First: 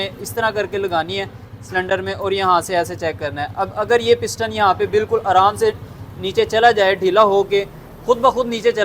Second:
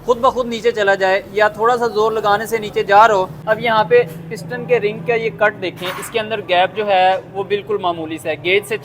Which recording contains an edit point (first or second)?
second